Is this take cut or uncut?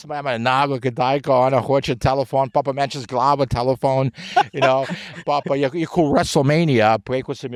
uncut